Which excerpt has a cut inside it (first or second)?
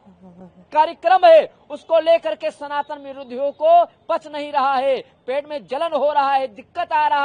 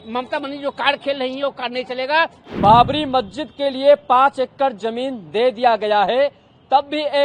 second